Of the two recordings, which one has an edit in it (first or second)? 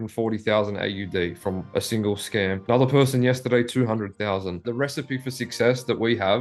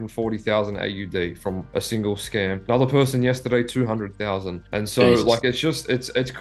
first